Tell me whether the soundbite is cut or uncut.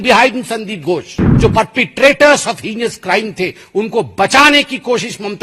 cut